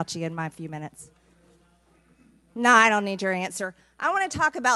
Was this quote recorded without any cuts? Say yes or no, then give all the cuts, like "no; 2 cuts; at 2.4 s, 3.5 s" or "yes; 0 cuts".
yes; 0 cuts